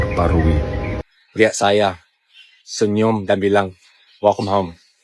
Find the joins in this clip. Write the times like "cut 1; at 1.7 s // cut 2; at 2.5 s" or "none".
cut 1; at 0.9 s